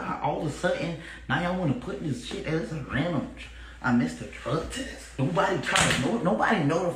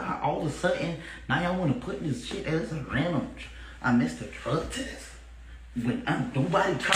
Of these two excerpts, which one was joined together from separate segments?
first; 1 cut; at 5.1 s

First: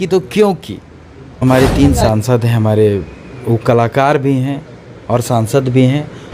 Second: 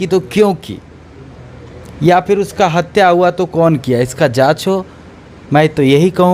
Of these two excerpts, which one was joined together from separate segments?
first; 1 cut; at 1.4 s

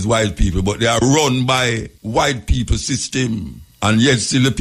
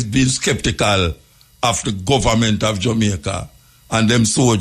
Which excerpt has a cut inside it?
first; 2 cuts; at 1.9 s, 3.6 s

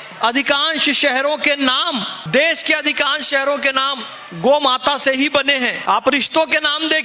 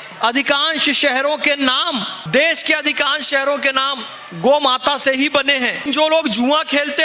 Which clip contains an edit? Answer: second; 1 cut; at 5.8 s

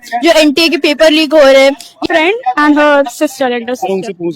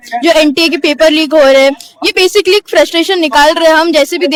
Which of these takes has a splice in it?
first; 1 cut; at 2.0 s

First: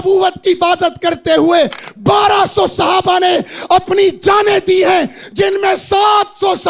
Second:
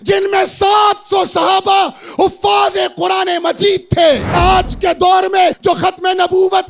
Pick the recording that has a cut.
second; 2 cuts; at 4.4 s, 5.6 s

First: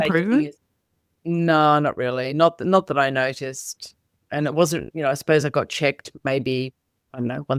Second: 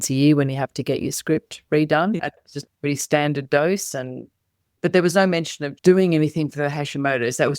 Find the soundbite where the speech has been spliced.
second; 2 cuts; at 2.2 s, 4.7 s

